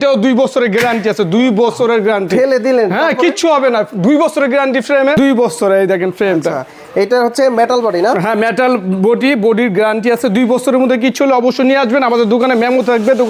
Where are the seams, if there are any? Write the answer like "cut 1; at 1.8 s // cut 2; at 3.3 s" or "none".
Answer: none